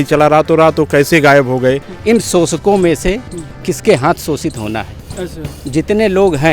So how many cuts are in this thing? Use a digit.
1